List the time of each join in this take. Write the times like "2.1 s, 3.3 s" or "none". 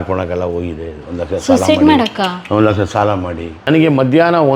3.6 s